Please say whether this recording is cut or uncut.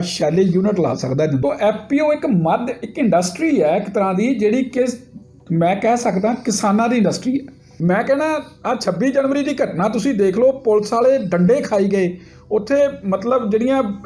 cut